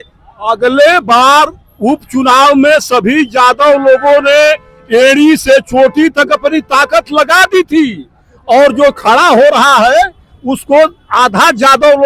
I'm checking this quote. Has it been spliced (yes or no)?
no